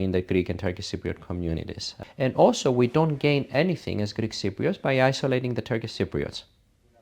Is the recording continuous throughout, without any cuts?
no; 1 cut; at 1.9 s

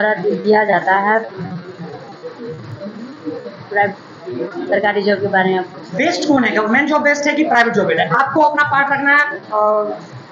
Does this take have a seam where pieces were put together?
no; 0 cuts

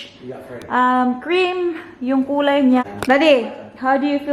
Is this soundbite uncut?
no; 1 cut; at 2.8 s

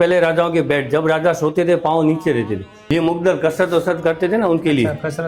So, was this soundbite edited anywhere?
yes; 1 cut; at 2.7 s

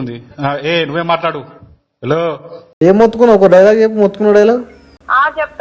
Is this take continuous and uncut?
no; 1 cut; at 2.7 s

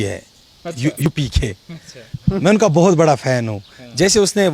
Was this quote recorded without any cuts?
no; 1 cut; at 1.1 s

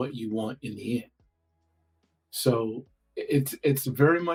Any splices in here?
no; 0 cuts

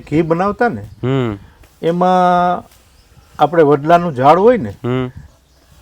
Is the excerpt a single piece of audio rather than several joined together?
yes; 0 cuts

